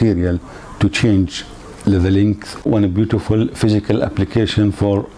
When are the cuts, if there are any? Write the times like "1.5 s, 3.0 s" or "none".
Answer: 2.6 s